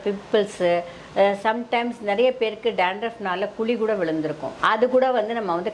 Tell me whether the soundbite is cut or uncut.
cut